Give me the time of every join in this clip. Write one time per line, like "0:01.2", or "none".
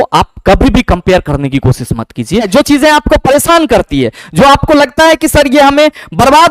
0:02.5